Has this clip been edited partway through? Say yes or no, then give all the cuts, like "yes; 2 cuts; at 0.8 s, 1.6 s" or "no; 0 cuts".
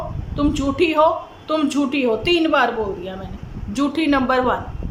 no; 0 cuts